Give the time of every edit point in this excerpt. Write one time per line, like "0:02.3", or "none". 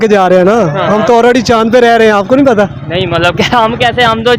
none